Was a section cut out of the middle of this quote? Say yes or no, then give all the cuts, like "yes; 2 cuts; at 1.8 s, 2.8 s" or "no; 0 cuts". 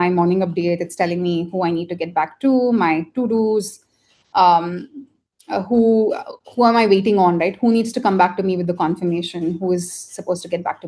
no; 0 cuts